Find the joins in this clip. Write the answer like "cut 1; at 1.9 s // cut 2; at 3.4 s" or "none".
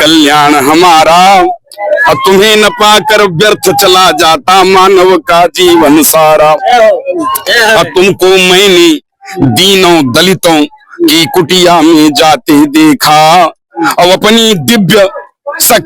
none